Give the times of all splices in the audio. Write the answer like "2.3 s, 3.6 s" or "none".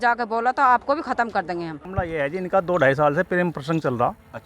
1.8 s